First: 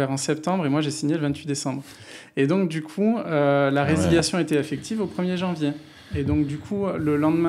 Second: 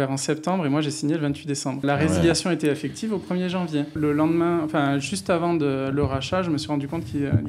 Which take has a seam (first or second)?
second